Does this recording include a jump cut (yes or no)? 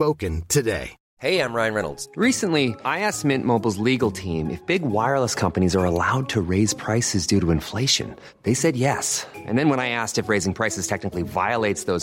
yes